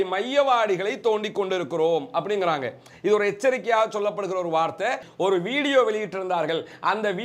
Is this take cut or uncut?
cut